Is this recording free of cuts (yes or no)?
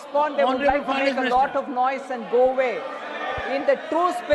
yes